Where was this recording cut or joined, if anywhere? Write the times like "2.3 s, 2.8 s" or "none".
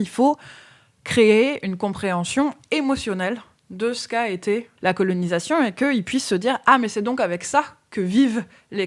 none

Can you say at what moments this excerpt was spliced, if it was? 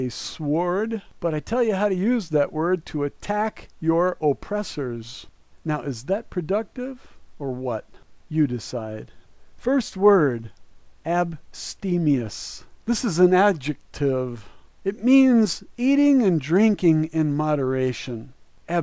12.4 s

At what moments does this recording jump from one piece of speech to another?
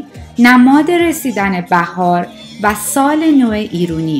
none

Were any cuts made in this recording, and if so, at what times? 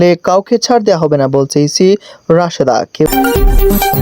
3.1 s

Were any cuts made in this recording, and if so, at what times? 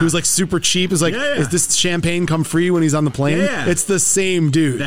none

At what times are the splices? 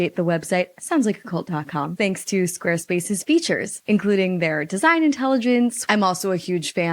1.9 s, 5.8 s

